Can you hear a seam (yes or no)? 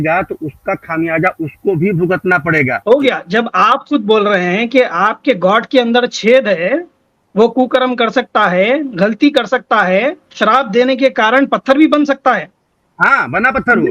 yes